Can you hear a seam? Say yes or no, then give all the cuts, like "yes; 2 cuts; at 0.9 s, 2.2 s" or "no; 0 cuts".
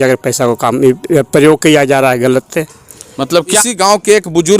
yes; 1 cut; at 3.5 s